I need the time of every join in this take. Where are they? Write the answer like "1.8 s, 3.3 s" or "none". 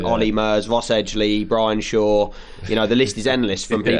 none